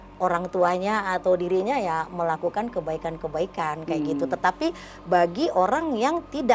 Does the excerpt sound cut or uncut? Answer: uncut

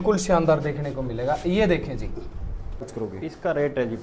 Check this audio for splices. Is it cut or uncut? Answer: cut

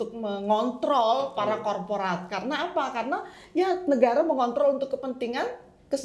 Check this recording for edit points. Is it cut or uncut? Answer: uncut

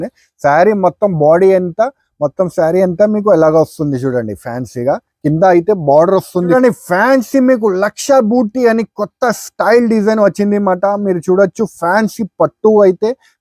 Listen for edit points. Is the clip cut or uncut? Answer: cut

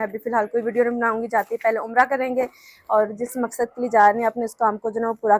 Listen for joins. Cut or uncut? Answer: uncut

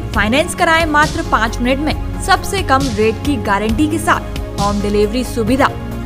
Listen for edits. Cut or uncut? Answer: uncut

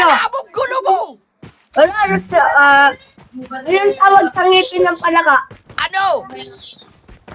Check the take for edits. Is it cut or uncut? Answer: uncut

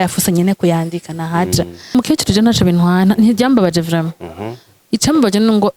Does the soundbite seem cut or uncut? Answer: cut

